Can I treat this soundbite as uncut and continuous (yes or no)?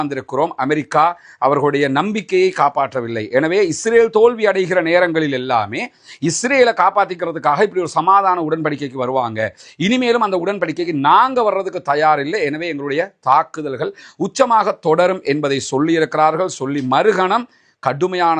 yes